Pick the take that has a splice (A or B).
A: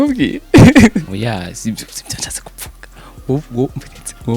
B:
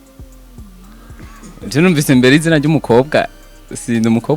A